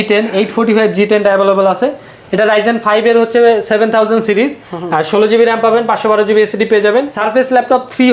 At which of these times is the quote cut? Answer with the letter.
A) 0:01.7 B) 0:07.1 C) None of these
B